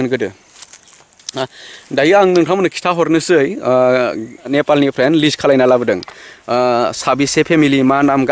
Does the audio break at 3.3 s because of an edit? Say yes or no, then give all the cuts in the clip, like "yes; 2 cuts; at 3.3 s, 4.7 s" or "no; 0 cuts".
no; 1 cut; at 4.5 s